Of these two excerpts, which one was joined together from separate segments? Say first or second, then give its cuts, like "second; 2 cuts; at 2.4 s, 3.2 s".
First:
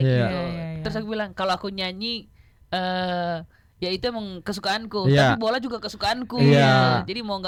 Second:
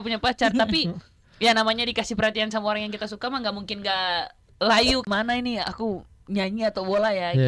second; 1 cut; at 5.0 s